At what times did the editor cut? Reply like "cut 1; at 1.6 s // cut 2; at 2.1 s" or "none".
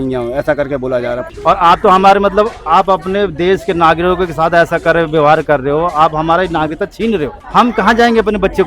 cut 1; at 1.3 s // cut 2; at 7.4 s